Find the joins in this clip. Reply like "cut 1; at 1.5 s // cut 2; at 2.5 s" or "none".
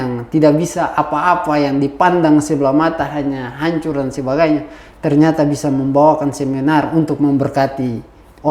none